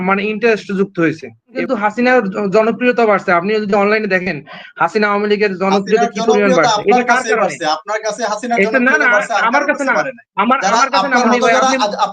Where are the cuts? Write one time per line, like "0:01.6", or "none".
0:01.5

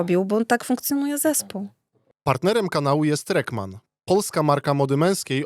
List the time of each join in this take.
0:02.0

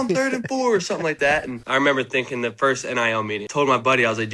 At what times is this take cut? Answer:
0:01.6
0:03.4

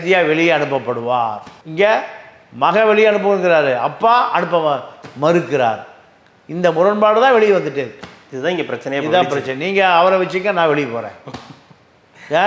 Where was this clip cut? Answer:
none

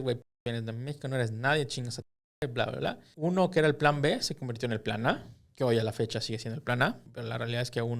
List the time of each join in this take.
0:03.1
0:07.1

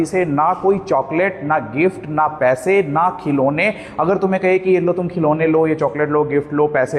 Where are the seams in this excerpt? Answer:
none

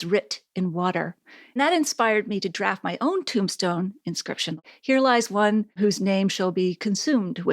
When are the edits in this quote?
0:01.6
0:04.6
0:05.8

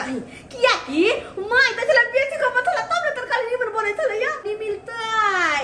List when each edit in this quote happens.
0:04.4

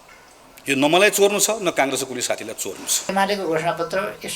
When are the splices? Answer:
0:03.1

